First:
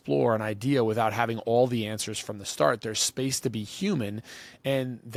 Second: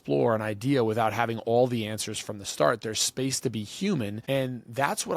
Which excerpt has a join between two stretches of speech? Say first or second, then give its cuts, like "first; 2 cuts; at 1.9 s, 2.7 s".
second; 1 cut; at 4.2 s